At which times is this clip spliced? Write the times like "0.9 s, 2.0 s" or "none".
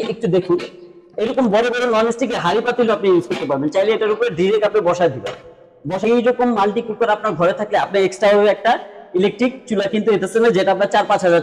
6.0 s